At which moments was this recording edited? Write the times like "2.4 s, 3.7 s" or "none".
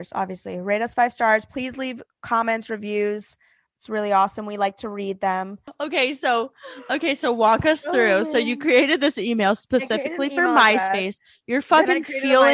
5.6 s